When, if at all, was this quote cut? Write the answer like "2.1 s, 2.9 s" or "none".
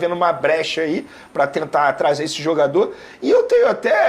none